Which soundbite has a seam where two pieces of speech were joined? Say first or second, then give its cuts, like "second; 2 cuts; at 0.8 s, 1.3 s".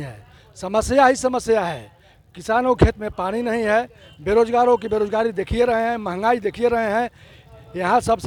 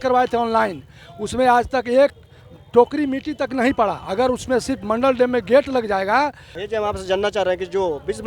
second; 1 cut; at 6.5 s